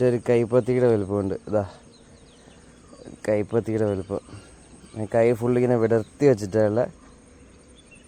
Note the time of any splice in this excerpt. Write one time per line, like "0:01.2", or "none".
none

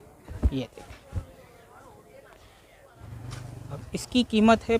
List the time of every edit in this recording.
0:03.0

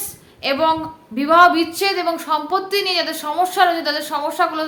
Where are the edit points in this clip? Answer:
none

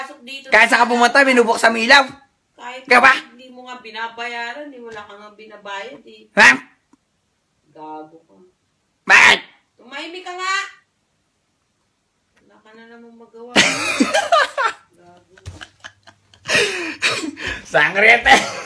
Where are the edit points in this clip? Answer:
none

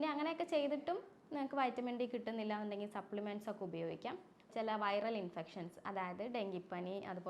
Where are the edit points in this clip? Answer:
0:04.5

